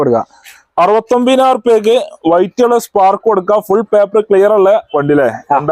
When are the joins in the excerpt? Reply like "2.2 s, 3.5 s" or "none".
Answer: none

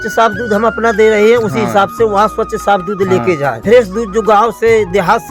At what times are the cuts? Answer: 3.6 s

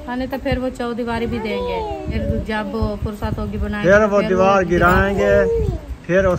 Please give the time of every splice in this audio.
2.2 s

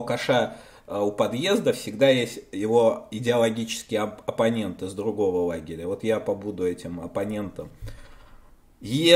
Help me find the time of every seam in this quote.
none

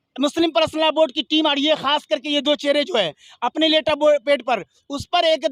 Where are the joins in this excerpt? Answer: none

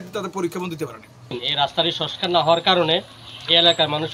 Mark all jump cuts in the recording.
1.4 s

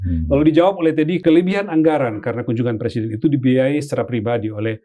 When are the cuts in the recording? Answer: 1.2 s

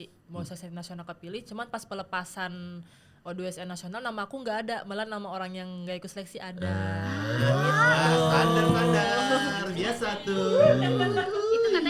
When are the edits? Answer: none

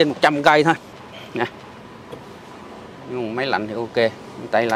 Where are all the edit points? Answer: none

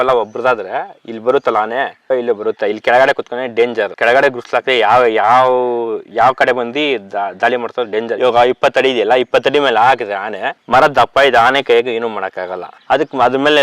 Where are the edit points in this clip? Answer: none

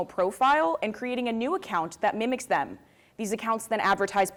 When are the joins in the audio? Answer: none

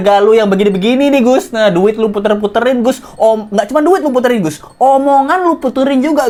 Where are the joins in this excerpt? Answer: none

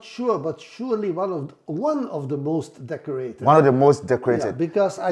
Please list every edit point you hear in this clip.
none

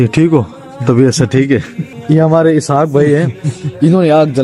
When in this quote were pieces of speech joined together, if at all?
1.9 s

